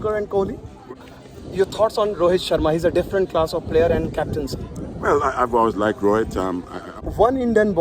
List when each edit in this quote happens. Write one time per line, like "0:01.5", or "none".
0:01.0
0:06.8